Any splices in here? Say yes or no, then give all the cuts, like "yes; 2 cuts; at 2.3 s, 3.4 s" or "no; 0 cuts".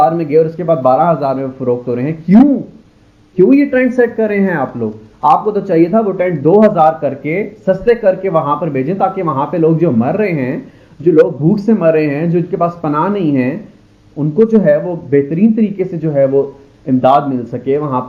no; 0 cuts